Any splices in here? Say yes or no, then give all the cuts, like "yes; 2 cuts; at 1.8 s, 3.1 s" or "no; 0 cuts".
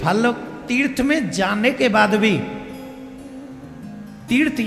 no; 0 cuts